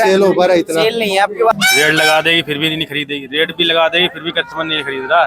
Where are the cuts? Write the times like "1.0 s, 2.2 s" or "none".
1.5 s